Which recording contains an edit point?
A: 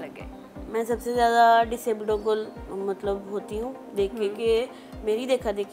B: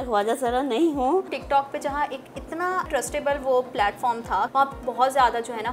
B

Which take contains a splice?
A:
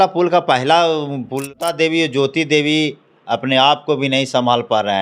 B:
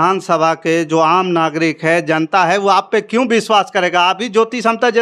A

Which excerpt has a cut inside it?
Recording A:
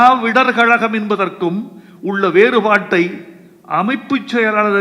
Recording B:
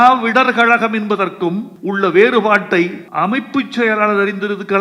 B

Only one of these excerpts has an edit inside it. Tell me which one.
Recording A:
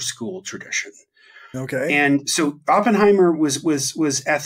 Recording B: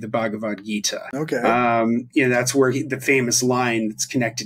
B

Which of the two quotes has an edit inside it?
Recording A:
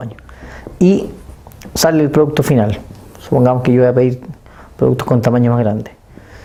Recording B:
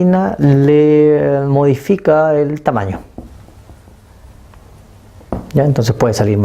B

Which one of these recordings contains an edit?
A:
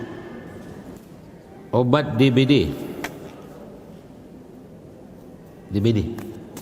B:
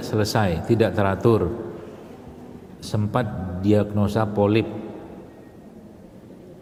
A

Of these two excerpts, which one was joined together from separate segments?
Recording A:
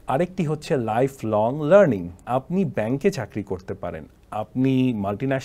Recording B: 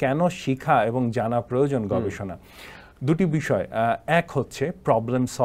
A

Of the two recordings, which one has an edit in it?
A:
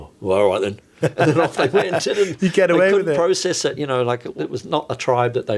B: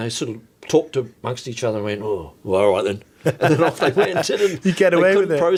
A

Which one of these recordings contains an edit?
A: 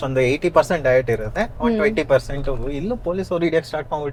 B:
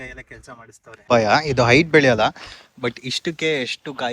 B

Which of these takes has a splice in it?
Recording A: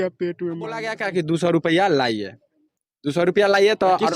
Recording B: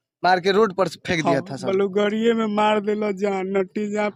A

